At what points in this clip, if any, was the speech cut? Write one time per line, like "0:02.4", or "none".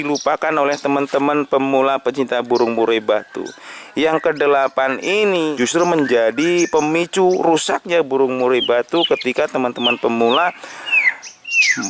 0:05.5